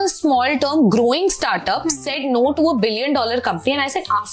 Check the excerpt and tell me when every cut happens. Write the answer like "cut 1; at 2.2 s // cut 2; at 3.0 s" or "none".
none